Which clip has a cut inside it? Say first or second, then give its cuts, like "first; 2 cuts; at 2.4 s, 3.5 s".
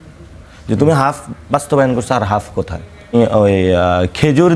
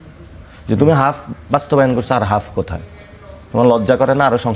first; 1 cut; at 3.1 s